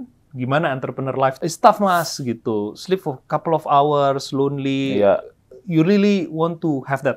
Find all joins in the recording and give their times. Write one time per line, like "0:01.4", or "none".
0:01.4